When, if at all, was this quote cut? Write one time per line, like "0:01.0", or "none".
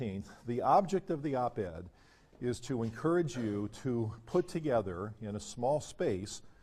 0:05.1